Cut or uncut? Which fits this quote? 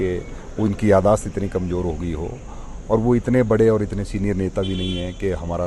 uncut